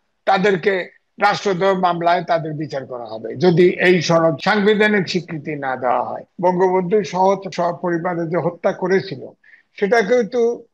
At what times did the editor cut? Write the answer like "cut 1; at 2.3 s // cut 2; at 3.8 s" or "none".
cut 1; at 4.4 s // cut 2; at 6.2 s // cut 3; at 7.5 s

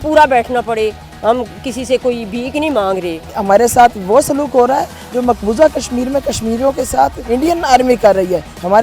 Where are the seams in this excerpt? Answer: cut 1; at 3.4 s // cut 2; at 7.2 s

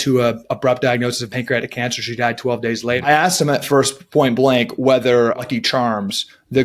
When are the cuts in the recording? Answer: cut 1; at 3.1 s // cut 2; at 5.4 s

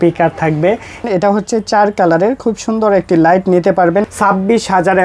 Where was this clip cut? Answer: cut 1; at 1.0 s // cut 2; at 4.0 s

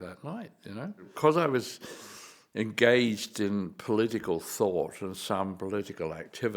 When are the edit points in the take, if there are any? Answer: cut 1; at 1.1 s

